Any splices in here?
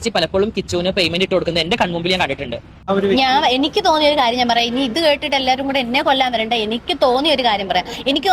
yes; 1 cut; at 2.7 s

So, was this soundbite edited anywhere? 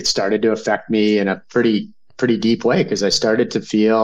no; 0 cuts

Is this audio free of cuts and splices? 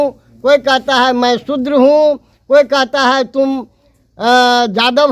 yes; 0 cuts

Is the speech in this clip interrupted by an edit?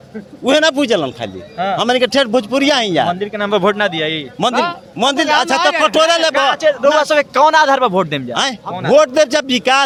no; 0 cuts

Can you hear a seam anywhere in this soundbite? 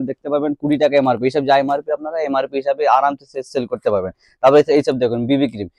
no; 0 cuts

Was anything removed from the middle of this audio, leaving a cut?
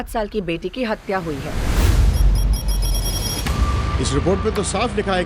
yes; 1 cut; at 3.7 s

